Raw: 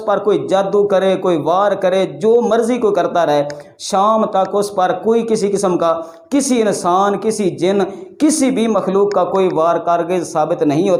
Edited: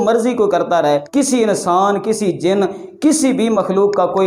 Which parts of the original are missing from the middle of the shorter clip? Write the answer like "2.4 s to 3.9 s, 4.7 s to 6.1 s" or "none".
3.5 s to 6.2 s